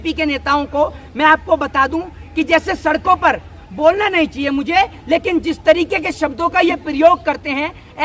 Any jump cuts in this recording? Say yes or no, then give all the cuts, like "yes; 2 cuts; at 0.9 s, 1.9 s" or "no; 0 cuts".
no; 0 cuts